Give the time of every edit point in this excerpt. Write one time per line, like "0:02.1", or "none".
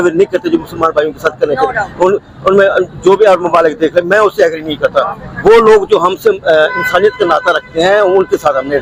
none